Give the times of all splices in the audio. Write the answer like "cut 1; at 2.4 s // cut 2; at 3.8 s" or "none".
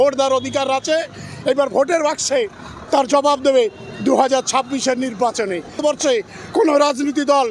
none